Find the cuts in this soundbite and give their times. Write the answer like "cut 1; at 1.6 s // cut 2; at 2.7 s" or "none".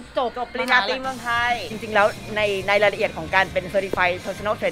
cut 1; at 1.8 s